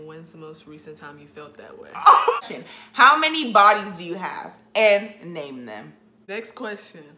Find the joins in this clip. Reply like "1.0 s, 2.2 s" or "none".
2.4 s, 6.3 s